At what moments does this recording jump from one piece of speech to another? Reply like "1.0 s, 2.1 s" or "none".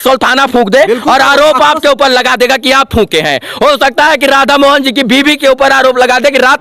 none

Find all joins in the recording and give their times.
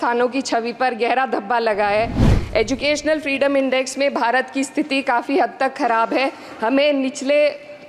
2.2 s

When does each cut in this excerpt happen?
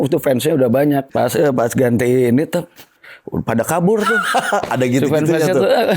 1.1 s

